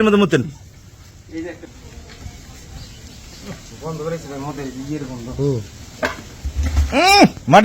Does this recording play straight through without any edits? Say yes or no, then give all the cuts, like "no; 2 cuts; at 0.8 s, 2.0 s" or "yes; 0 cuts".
no; 1 cut; at 1.6 s